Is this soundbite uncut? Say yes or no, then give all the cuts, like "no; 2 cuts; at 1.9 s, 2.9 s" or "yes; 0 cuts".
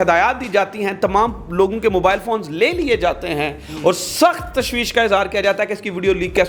yes; 0 cuts